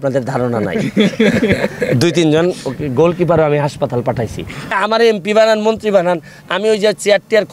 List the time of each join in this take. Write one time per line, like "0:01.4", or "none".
0:04.7